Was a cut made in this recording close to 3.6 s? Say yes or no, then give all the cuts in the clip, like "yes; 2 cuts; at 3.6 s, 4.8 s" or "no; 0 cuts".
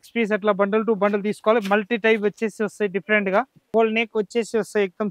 yes; 1 cut; at 3.6 s